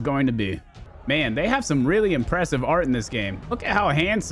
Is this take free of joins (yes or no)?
no